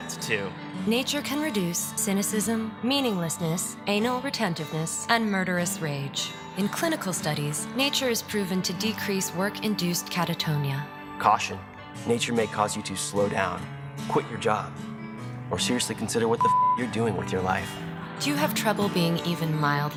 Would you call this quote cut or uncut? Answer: uncut